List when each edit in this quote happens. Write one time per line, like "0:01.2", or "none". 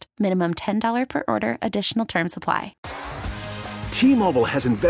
0:02.8